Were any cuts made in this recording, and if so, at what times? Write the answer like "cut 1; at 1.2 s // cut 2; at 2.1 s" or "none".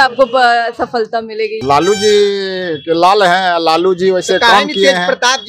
cut 1; at 1.6 s

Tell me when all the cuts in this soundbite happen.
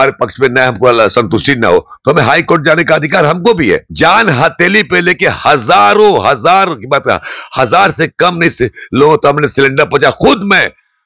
cut 1; at 3.9 s

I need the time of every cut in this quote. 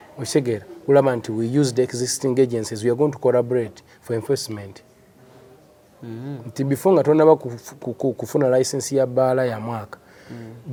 none

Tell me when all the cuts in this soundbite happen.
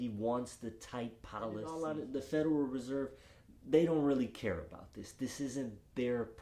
cut 1; at 1.7 s

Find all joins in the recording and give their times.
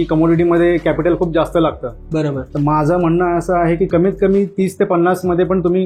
none

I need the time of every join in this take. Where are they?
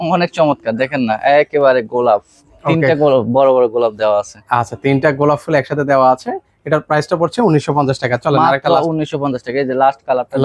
none

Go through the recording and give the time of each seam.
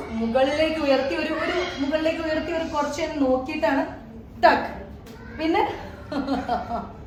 none

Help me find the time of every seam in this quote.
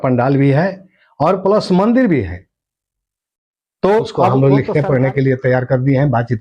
cut 1; at 4.3 s

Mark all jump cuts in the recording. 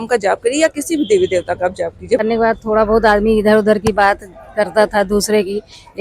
cut 1; at 2.2 s

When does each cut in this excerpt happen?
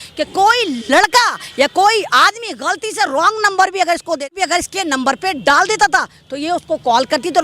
cut 1; at 4.3 s

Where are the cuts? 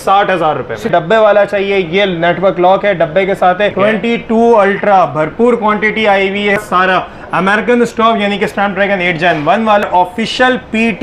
cut 1; at 0.9 s // cut 2; at 3.7 s // cut 3; at 6.6 s // cut 4; at 9.8 s

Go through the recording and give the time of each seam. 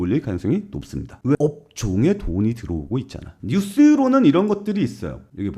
cut 1; at 3.4 s

